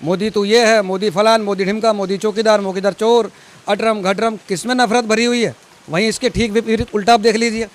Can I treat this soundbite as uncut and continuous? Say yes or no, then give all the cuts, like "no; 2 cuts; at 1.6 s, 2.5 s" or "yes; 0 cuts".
yes; 0 cuts